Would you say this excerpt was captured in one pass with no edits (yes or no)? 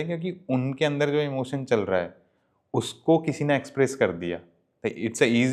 yes